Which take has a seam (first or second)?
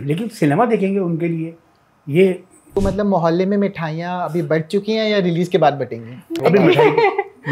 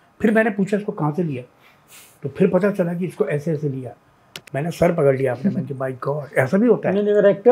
first